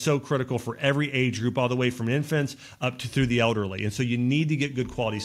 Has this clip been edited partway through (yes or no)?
no